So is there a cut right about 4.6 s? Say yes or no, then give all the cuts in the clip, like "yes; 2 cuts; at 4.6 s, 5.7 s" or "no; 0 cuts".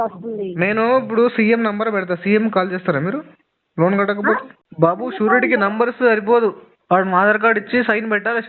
yes; 1 cut; at 4.6 s